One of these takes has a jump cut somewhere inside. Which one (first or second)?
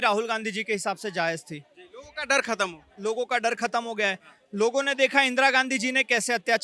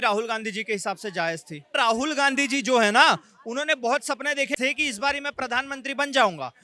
second